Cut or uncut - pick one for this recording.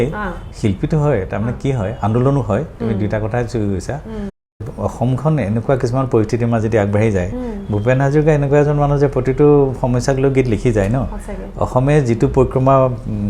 cut